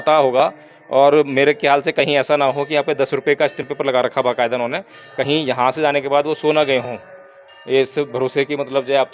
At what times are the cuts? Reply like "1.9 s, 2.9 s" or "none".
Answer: none